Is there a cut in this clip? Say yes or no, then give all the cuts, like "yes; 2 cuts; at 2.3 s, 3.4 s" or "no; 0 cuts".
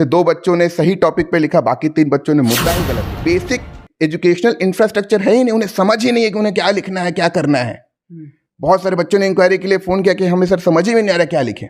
yes; 1 cut; at 2.9 s